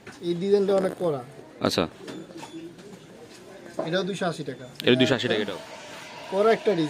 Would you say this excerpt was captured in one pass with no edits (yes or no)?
no